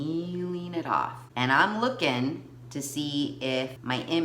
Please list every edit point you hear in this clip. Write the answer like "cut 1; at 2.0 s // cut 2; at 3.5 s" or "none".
cut 1; at 1.2 s